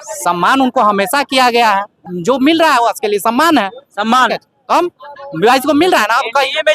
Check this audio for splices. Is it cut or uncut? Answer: cut